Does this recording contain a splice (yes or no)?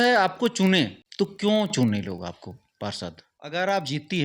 yes